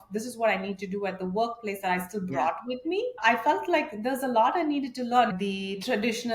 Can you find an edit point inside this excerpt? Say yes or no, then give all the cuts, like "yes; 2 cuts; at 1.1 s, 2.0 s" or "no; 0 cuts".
yes; 2 cuts; at 3.2 s, 5.3 s